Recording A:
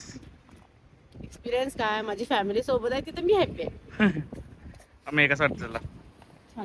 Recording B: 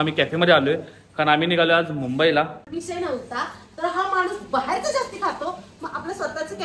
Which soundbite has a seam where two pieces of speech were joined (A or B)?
B